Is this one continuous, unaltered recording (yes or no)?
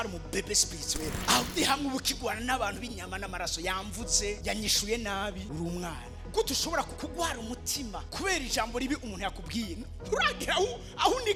yes